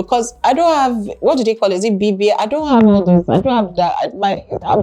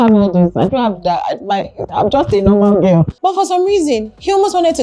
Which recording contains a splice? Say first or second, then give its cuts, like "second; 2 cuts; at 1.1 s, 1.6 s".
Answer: second; 1 cut; at 3.1 s